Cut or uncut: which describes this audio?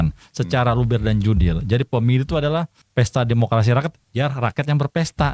cut